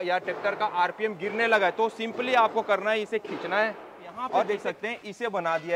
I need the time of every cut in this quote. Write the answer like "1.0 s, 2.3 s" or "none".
4.5 s